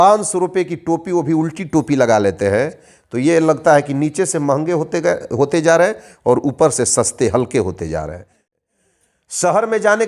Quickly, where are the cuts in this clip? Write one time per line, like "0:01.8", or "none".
0:08.6